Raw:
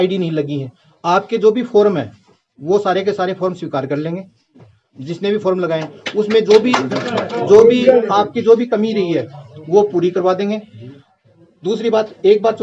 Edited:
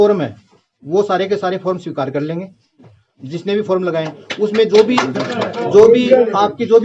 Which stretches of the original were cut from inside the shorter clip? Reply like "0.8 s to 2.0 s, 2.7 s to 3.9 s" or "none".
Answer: none